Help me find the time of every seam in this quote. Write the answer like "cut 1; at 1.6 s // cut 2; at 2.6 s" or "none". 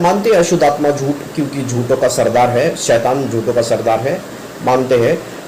none